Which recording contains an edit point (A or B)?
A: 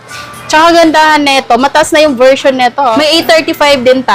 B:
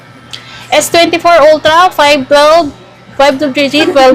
A